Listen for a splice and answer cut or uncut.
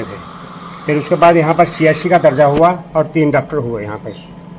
uncut